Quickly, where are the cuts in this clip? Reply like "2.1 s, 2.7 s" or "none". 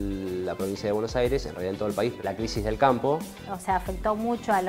2.2 s, 3.5 s

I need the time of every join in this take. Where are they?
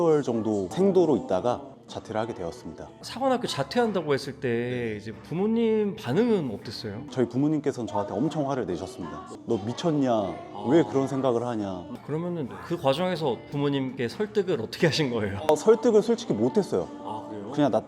none

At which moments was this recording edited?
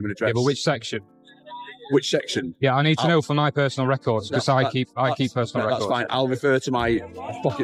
none

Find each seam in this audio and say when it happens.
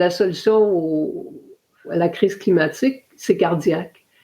1.9 s

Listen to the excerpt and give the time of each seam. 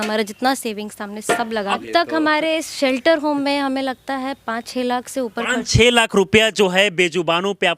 1.8 s

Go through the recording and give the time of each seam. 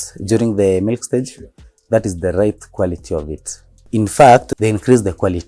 3.8 s, 4.5 s

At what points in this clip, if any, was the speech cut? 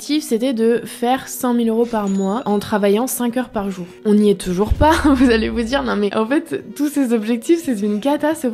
none

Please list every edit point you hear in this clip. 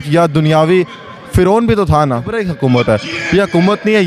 2.4 s

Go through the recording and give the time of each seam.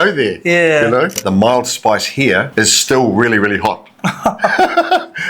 1.2 s, 2.5 s

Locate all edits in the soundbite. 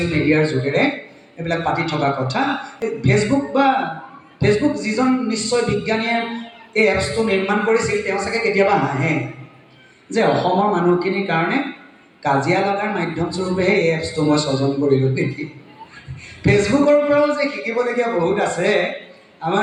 none

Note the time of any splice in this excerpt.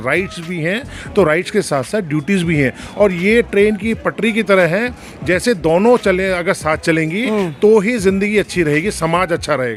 none

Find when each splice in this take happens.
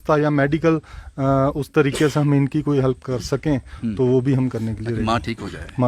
none

